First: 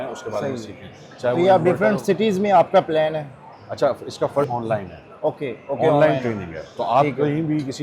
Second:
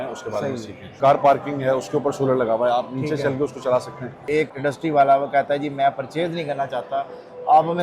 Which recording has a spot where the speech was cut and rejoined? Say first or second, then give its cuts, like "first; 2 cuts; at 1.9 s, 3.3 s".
second; 2 cuts; at 0.9 s, 4.1 s